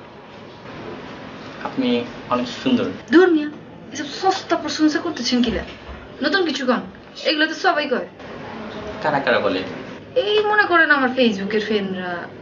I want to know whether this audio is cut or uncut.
cut